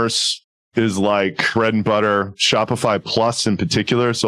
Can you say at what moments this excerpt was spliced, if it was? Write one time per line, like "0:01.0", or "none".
0:01.4